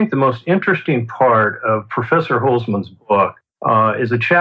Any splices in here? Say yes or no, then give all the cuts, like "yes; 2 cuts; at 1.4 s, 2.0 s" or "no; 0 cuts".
yes; 1 cut; at 1.8 s